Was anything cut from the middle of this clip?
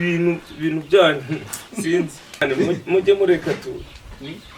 yes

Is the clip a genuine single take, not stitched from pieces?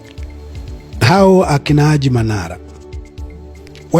no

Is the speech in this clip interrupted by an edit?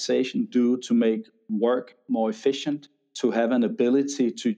no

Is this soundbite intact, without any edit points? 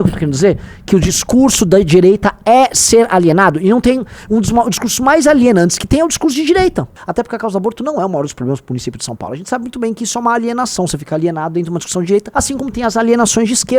no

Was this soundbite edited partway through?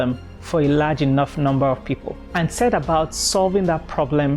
yes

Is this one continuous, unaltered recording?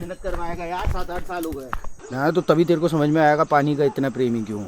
no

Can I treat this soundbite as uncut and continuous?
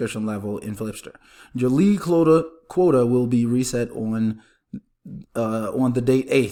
yes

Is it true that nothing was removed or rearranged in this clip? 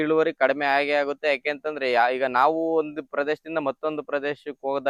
yes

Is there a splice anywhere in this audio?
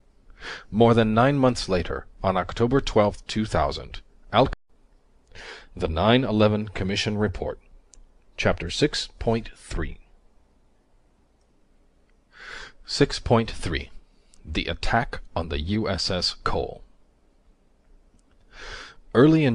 no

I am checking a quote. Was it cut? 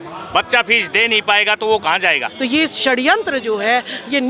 yes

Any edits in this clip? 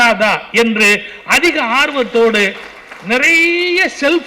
no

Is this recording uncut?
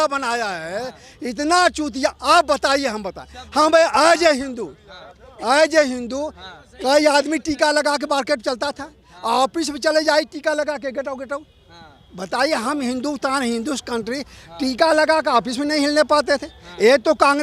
yes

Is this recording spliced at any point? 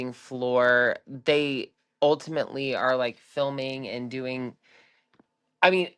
no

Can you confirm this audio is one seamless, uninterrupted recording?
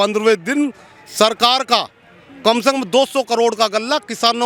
yes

